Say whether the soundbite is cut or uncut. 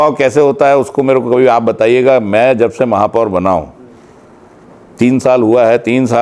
uncut